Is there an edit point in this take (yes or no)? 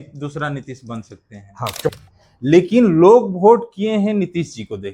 yes